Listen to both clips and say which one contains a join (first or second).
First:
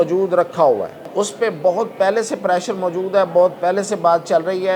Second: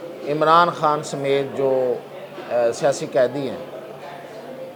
first